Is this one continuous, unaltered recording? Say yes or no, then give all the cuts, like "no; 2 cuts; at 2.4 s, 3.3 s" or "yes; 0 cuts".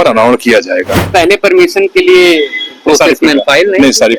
no; 1 cut; at 1.0 s